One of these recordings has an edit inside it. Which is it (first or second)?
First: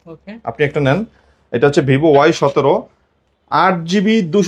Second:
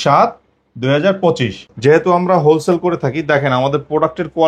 second